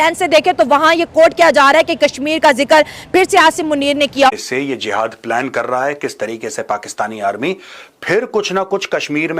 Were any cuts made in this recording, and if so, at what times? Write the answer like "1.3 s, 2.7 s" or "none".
4.3 s

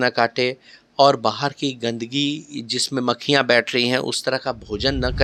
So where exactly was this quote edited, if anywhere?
none

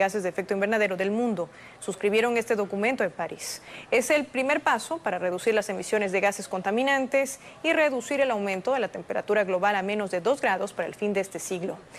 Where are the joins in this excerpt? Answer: 0.9 s

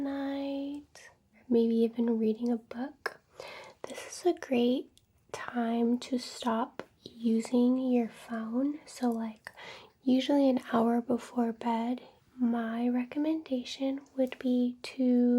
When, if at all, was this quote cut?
1.3 s, 12.2 s

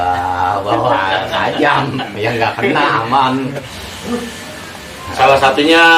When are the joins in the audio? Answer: 3.7 s

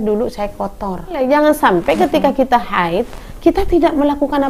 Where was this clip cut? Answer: 1.2 s

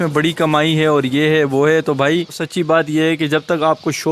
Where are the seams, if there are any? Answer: 2.4 s

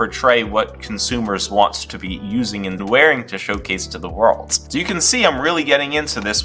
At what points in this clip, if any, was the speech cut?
4.5 s

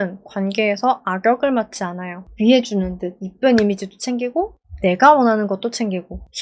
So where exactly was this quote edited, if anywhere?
none

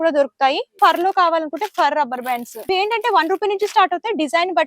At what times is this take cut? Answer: 0.7 s, 2.7 s

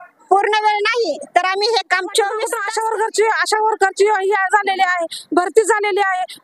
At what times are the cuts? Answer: 2.6 s

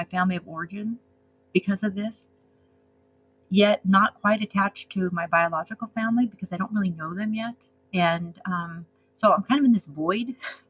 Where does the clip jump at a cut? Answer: none

